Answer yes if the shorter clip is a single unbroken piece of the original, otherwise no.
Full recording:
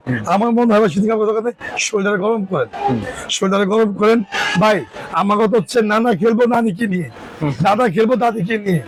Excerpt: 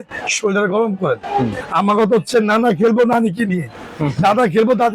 no